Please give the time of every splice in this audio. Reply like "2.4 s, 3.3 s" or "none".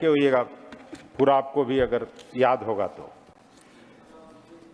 none